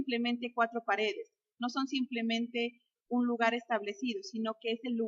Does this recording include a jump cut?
yes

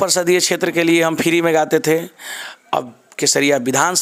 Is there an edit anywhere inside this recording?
no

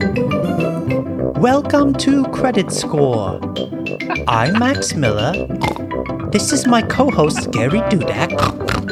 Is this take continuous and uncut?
yes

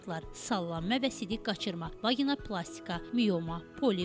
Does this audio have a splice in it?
no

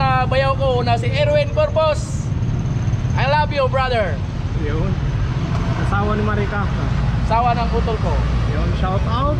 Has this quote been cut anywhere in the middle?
no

